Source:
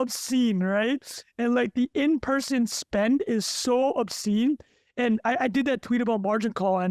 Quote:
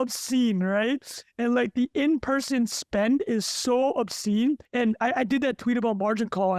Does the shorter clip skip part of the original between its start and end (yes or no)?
yes